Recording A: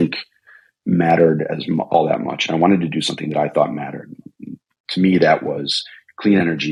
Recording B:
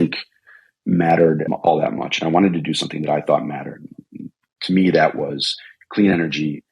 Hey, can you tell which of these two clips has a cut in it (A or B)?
B